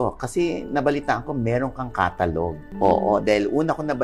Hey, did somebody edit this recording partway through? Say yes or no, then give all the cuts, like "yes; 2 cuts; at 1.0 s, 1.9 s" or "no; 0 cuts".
no; 0 cuts